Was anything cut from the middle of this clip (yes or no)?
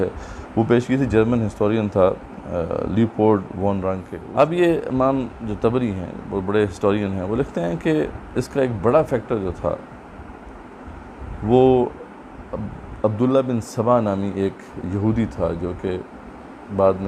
yes